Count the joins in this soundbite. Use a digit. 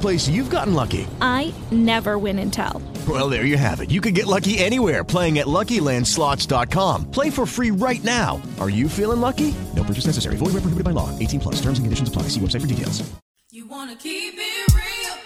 1